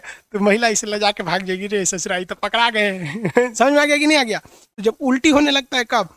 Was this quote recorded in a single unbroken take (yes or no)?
yes